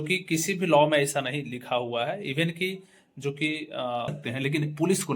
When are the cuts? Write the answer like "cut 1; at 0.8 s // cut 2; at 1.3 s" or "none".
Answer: cut 1; at 4.2 s